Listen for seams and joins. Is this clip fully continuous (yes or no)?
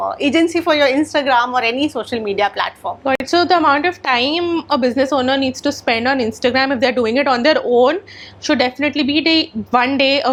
yes